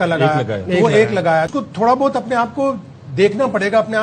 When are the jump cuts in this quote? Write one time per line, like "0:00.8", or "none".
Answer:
0:01.5